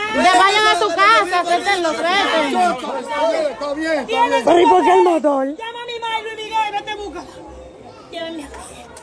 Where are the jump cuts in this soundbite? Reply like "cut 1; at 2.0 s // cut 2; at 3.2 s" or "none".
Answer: cut 1; at 3.1 s